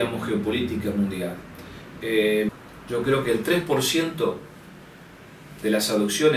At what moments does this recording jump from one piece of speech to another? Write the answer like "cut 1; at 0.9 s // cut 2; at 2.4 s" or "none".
cut 1; at 2.5 s